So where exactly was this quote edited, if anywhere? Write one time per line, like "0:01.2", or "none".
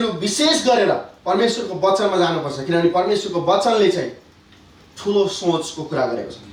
none

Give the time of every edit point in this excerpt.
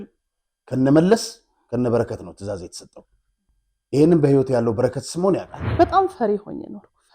0:05.6

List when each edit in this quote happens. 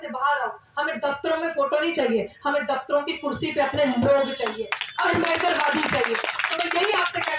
none

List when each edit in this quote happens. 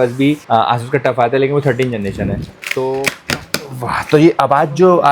0:03.2

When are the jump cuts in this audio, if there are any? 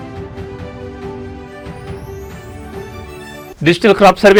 none

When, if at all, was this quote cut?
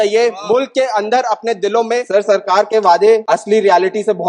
0:02.1
0:03.2

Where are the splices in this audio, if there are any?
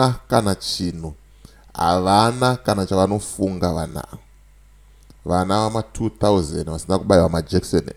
none

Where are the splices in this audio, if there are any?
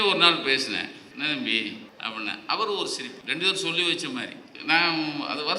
0:01.0
0:01.9
0:03.2
0:04.5

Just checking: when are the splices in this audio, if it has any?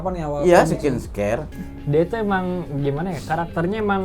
0:01.5

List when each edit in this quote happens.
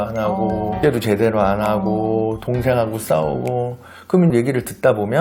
0:00.8
0:04.3

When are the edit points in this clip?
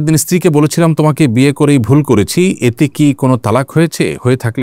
none

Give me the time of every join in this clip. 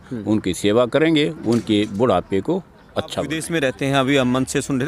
0:03.4

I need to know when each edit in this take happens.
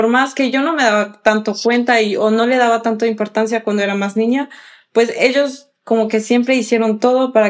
none

